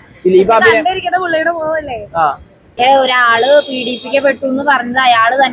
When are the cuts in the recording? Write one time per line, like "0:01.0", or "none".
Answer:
0:02.7